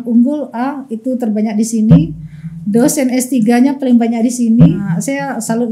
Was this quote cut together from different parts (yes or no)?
yes